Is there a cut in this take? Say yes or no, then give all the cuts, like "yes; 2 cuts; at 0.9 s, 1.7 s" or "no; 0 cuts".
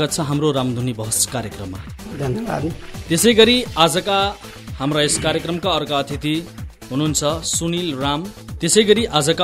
yes; 2 cuts; at 2.9 s, 8.4 s